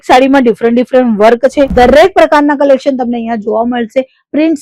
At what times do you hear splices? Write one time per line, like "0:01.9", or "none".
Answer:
0:01.7